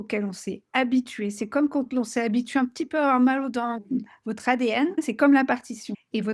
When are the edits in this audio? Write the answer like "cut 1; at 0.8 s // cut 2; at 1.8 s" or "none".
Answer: cut 1; at 3.8 s